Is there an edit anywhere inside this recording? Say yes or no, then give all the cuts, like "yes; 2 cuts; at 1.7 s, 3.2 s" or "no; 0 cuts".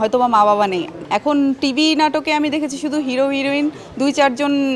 yes; 1 cut; at 0.9 s